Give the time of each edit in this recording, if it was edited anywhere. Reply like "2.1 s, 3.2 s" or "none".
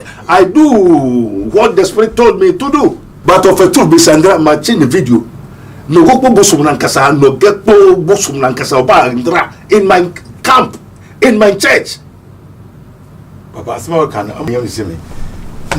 3.1 s, 14.5 s

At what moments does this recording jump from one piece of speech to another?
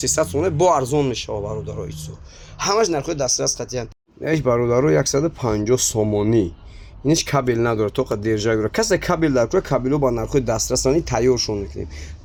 none

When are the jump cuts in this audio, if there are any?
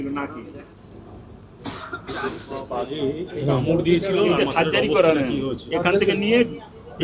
none

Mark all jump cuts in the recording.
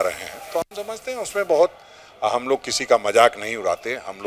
none

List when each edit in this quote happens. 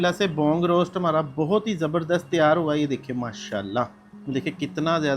4.1 s

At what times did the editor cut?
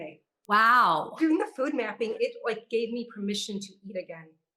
1.1 s, 2.1 s

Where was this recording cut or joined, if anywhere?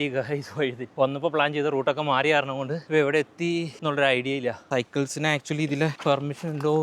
0.8 s, 2.8 s, 3.7 s, 4.6 s, 6.0 s

